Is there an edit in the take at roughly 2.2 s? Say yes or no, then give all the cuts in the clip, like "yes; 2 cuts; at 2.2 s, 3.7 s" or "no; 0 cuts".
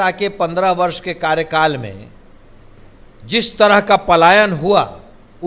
no; 0 cuts